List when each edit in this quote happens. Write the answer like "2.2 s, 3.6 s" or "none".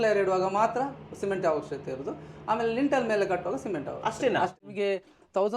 4.6 s